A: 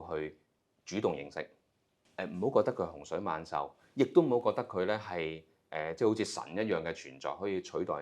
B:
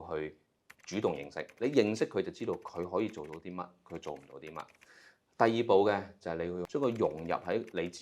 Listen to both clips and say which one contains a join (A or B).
B